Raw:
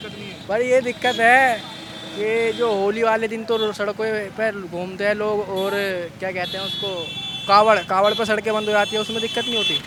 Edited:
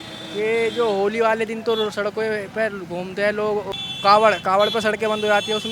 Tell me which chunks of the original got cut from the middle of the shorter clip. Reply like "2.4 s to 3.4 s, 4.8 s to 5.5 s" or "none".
5.5 s to 7.1 s